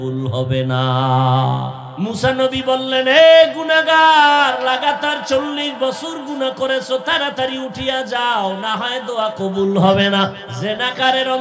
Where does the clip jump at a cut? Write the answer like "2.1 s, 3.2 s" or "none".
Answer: 1.8 s, 10.5 s